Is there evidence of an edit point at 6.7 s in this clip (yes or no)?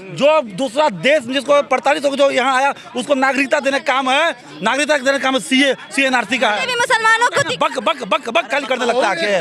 no